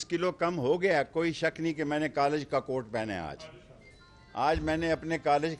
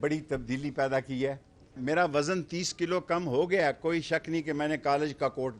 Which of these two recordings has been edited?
second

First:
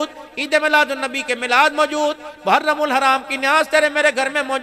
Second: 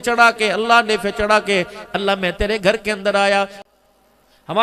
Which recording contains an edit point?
second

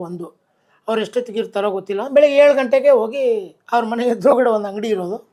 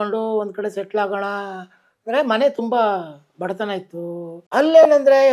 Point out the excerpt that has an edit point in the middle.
second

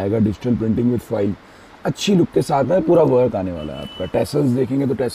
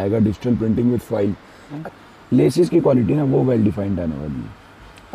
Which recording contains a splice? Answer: second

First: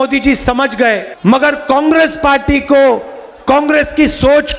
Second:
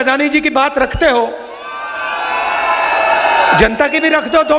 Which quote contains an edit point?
first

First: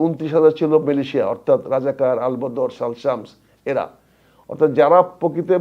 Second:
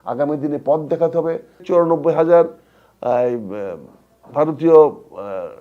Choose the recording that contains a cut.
second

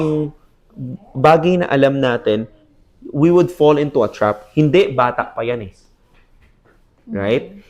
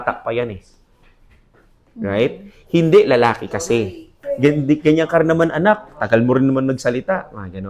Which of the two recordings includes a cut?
second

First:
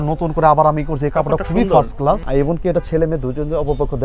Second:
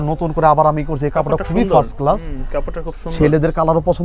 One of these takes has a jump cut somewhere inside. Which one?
first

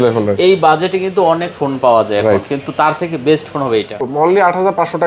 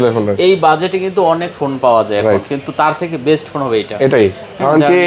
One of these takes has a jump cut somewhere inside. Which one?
first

